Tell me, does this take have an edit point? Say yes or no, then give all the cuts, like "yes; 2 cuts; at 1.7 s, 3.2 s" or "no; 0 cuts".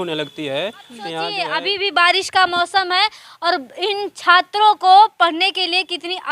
yes; 1 cut; at 1.3 s